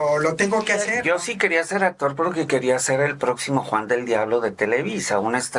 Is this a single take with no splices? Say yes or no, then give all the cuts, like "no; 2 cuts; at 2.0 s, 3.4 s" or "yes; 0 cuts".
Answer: no; 1 cut; at 0.9 s